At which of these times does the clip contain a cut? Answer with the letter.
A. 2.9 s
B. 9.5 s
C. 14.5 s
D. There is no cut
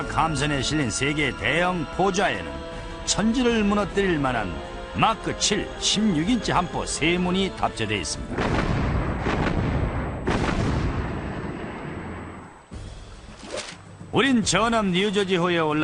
B